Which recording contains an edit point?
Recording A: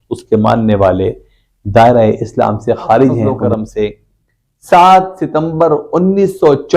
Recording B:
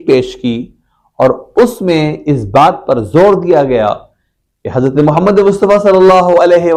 A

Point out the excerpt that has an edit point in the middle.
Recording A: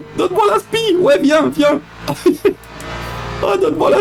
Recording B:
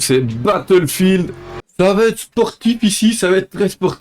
B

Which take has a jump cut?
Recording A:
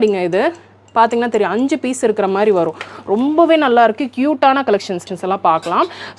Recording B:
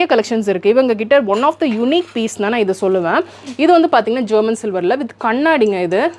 A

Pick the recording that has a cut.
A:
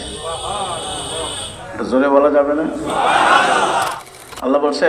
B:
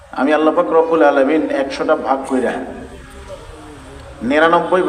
A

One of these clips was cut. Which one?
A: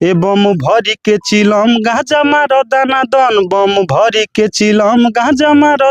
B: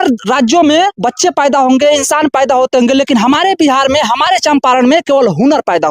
B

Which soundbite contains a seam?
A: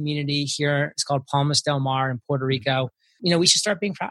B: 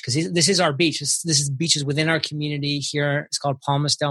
A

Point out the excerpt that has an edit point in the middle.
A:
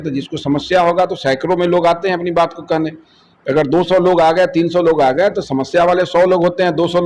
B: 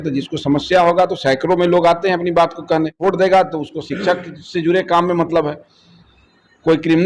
B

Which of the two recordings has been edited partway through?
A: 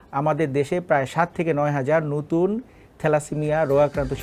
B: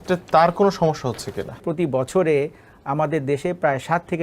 B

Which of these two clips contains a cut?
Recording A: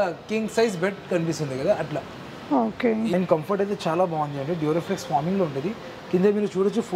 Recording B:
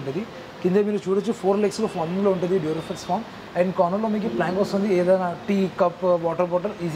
A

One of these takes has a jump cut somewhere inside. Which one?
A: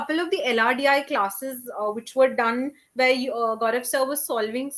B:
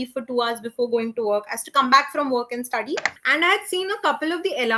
B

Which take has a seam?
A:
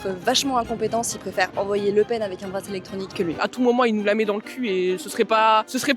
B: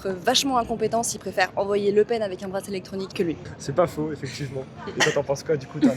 A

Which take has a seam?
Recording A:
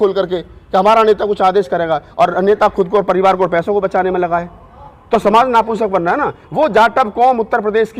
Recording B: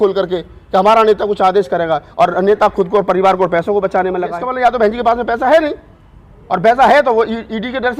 B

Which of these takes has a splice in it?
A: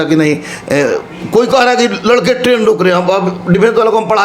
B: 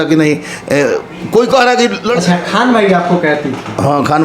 B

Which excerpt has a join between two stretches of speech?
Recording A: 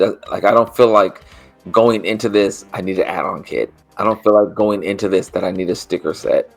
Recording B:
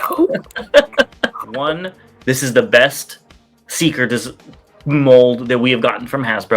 B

